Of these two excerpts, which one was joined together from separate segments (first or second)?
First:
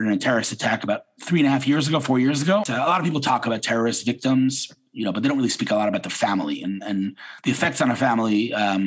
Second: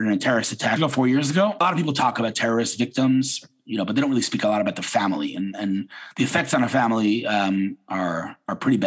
second